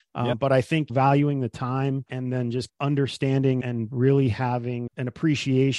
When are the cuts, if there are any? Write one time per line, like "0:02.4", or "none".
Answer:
0:00.9
0:02.7
0:03.6
0:04.9